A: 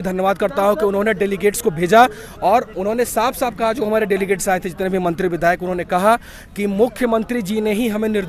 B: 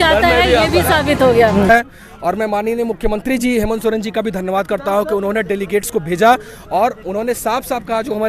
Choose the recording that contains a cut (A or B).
B